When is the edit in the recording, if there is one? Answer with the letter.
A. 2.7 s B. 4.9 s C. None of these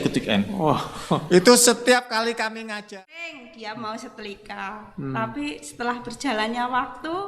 A